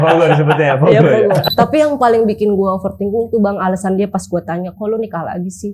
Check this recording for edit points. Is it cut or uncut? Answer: cut